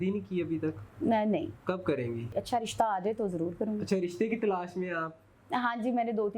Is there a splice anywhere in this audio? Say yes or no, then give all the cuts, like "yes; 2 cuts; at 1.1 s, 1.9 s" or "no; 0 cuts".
yes; 1 cut; at 2.3 s